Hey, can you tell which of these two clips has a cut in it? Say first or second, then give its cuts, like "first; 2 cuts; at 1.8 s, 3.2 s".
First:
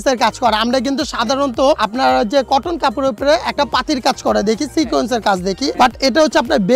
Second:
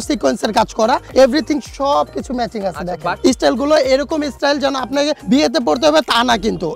second; 2 cuts; at 1.1 s, 3.2 s